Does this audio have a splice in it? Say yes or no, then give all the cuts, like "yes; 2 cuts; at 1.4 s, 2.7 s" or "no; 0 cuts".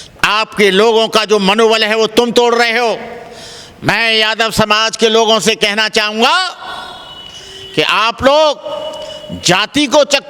no; 0 cuts